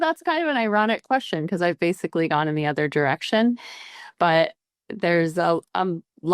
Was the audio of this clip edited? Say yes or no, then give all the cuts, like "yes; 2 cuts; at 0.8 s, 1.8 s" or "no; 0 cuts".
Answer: no; 0 cuts